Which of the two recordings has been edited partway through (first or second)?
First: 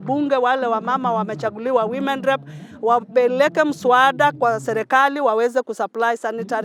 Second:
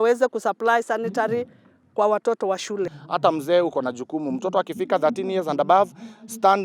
second